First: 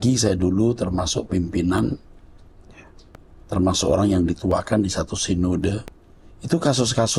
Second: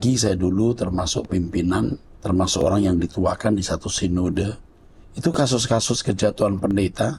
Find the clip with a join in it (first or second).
second